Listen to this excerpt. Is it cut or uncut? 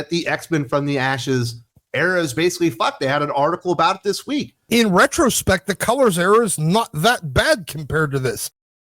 cut